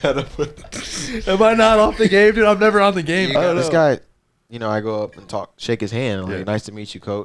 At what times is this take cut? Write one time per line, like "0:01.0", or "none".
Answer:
0:03.5